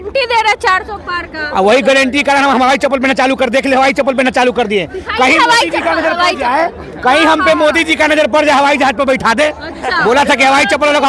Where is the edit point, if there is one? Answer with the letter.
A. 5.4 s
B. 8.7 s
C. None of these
C